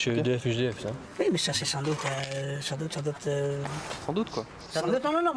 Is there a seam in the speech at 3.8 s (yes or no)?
yes